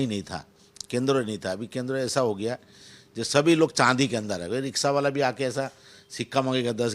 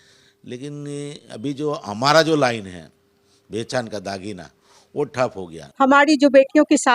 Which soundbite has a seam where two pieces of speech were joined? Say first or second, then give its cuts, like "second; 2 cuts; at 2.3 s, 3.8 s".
second; 1 cut; at 5.6 s